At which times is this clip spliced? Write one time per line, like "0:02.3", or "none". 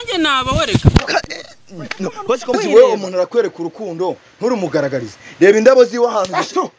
0:02.6